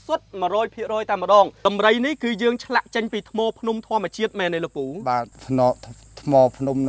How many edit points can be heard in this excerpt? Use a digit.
1